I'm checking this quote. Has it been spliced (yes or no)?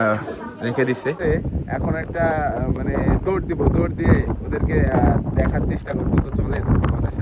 yes